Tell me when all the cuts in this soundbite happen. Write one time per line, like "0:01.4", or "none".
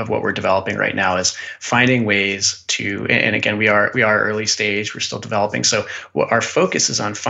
none